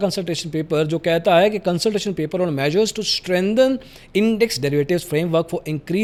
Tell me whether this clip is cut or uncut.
uncut